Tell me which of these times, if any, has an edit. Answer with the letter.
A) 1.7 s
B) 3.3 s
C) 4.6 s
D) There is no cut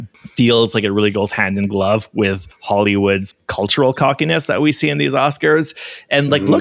B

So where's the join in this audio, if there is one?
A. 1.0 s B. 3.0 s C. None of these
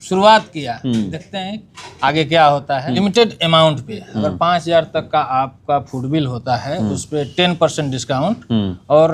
B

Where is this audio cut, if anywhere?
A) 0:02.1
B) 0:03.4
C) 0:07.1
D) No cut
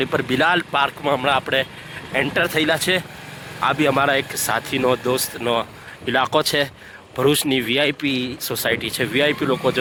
D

